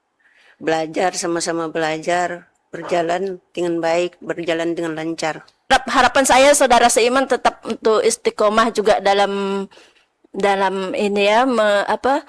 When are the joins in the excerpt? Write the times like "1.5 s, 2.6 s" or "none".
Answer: 5.7 s